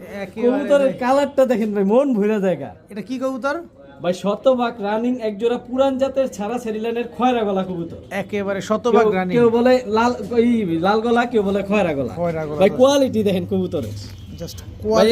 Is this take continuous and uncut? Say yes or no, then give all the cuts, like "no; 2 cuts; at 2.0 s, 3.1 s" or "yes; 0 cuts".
yes; 0 cuts